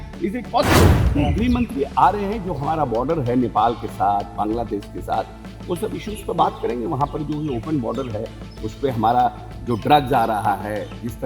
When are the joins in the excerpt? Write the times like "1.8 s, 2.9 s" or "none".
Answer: 1.0 s